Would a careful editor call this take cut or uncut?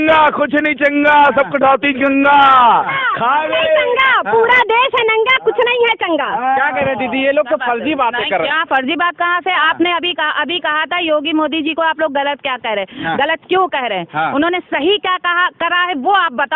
uncut